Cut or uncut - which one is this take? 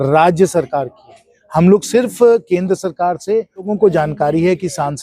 cut